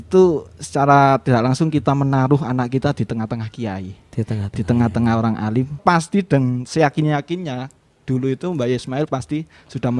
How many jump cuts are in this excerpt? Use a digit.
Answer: 1